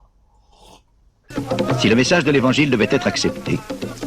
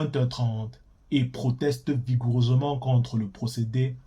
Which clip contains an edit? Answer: first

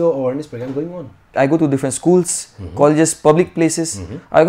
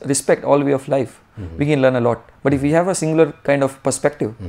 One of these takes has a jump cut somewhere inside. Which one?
first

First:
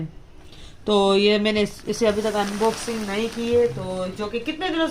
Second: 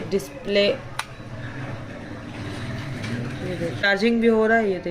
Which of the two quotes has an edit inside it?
second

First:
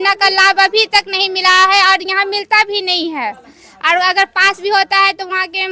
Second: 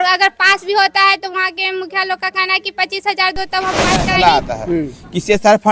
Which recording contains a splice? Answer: second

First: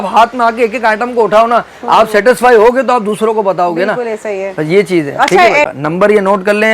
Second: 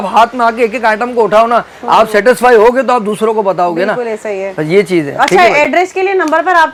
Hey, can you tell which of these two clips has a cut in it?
first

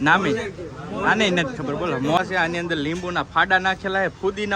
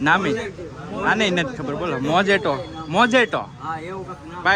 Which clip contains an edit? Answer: first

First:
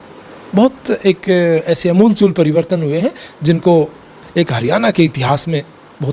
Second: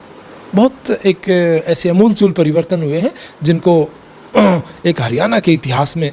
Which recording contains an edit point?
first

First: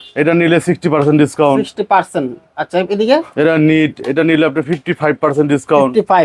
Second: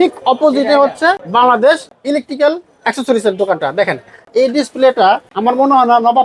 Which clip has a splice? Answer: second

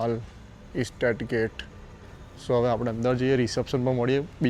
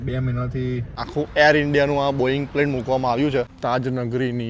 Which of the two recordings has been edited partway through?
second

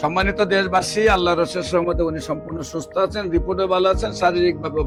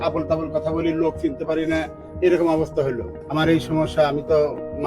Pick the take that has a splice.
second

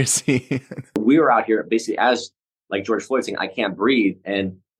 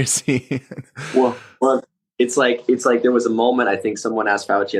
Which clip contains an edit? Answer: first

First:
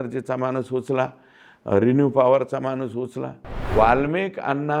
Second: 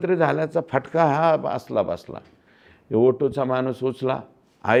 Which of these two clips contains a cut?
first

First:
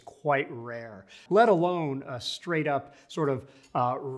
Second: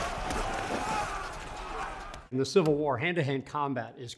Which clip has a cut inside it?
first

